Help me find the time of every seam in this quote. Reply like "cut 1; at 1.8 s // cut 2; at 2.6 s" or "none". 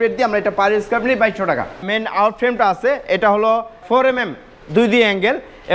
cut 1; at 1.9 s // cut 2; at 3.8 s